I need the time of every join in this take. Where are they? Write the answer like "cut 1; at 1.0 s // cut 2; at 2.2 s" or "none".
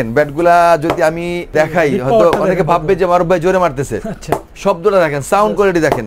cut 1; at 1.4 s